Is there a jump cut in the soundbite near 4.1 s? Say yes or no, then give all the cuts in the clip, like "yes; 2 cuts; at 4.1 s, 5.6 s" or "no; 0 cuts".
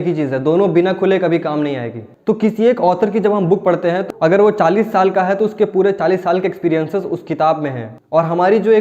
yes; 3 cuts; at 2.1 s, 4.1 s, 7.9 s